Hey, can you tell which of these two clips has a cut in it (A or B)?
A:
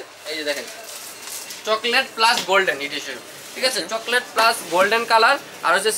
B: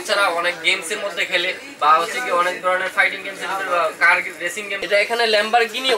B